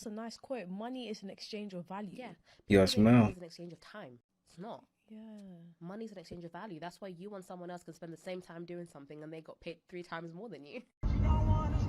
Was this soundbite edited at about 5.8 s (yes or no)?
no